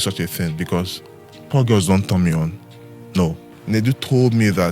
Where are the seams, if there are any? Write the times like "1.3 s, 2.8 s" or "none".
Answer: 3.5 s